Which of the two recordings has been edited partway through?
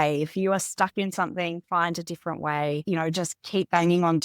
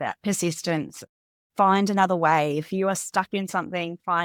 first; 1 cut; at 2.8 s

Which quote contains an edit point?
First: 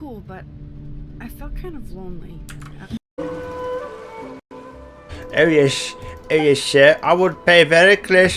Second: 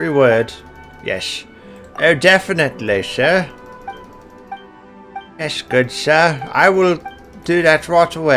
first; 2 cuts; at 3.1 s, 4.5 s

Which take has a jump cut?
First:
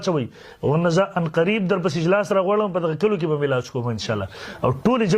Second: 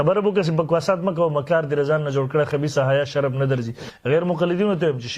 second; 1 cut; at 3.9 s

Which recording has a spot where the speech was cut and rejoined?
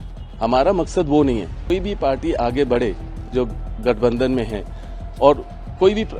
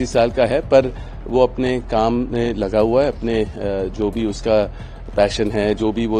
first; 1 cut; at 1.7 s

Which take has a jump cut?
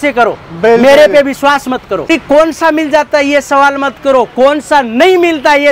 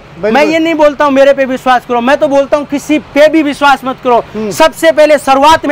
first; 1 cut; at 2.1 s

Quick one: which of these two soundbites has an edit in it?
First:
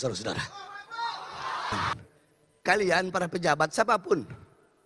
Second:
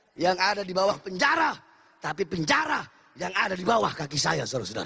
first; 1 cut; at 1.9 s

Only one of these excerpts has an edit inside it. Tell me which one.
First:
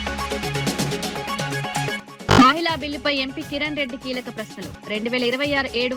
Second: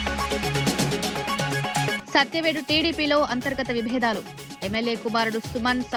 first; 1 cut; at 2.0 s

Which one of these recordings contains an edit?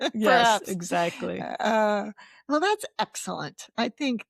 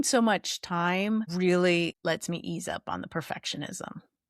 second; 2 cuts; at 1.3 s, 2.0 s

